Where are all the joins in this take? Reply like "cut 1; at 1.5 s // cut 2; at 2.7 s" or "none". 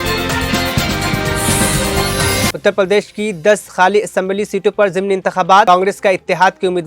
cut 1; at 2.5 s